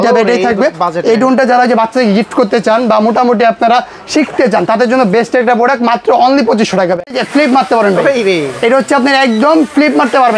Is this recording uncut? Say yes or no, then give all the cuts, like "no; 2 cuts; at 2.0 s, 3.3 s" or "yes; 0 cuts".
no; 1 cut; at 7.0 s